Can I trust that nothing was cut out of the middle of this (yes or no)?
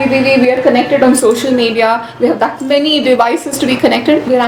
yes